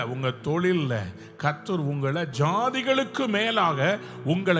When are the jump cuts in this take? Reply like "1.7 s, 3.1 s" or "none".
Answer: 2.3 s